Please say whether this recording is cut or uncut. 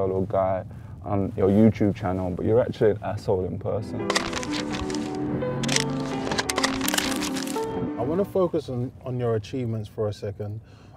uncut